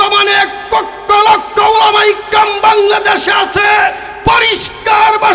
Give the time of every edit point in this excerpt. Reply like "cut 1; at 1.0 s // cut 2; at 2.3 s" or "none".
none